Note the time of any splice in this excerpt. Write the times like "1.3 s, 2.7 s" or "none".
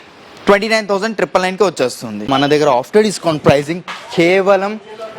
2.2 s